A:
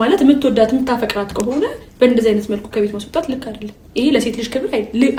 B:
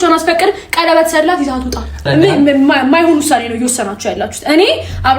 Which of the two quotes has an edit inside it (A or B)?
B